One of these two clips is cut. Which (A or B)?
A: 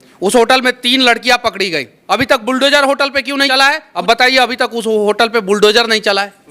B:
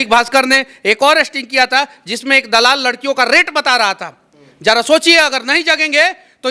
A